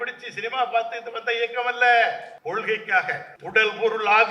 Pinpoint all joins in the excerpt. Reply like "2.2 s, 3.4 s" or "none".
2.3 s, 3.3 s